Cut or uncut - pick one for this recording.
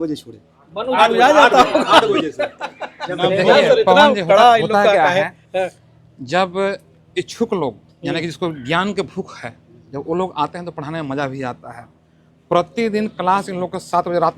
uncut